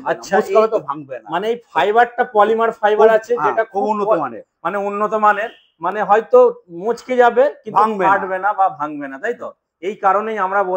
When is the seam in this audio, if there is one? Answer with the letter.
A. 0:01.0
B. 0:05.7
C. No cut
C